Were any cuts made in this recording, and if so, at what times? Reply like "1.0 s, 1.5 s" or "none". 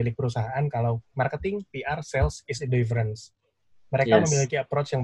1.1 s